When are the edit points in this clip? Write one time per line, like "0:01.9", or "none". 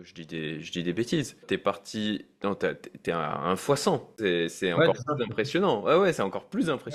0:01.4